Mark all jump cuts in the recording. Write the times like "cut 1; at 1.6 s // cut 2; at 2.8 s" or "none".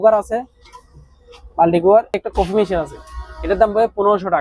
cut 1; at 2.3 s